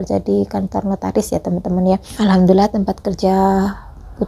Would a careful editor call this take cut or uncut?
uncut